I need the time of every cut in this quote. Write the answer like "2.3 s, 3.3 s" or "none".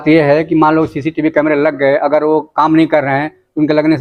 none